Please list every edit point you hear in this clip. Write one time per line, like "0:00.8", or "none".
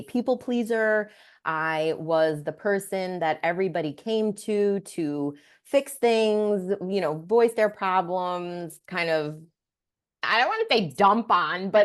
none